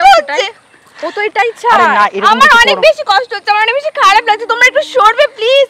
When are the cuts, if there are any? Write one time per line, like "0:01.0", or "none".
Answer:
none